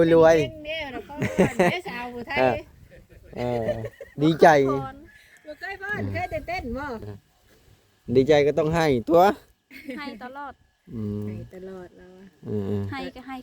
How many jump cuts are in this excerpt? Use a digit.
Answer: 1